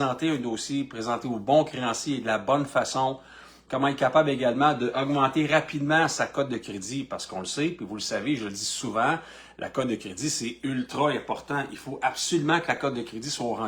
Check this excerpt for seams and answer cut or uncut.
uncut